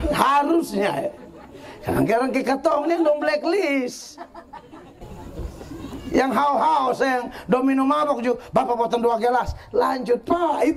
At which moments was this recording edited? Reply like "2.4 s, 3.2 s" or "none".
5.0 s